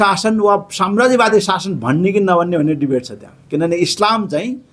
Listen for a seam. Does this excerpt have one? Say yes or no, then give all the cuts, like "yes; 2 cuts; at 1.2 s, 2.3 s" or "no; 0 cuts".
no; 0 cuts